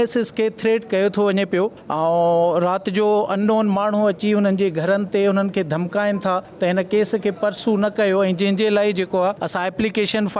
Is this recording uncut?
no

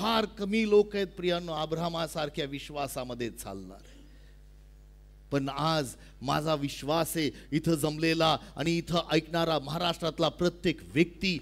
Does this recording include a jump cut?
no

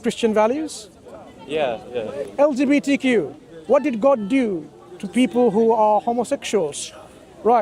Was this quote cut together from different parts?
yes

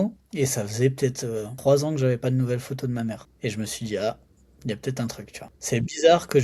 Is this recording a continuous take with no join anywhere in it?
no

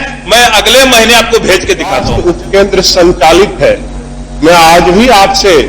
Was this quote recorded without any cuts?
no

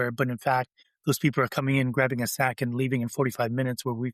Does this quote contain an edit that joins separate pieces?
no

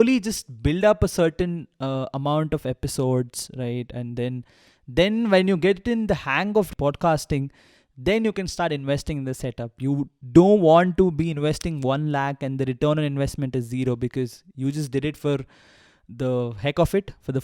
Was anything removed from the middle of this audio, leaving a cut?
yes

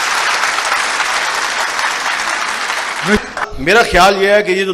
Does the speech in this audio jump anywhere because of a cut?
yes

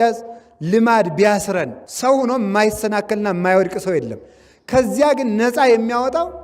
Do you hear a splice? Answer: yes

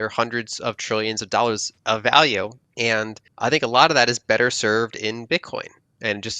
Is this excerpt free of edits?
no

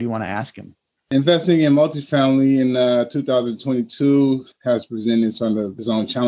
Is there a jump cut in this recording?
yes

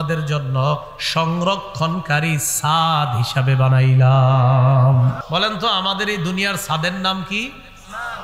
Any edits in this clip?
yes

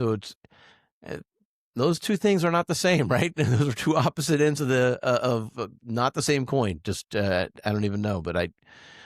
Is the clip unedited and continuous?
yes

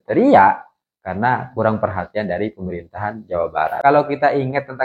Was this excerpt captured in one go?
no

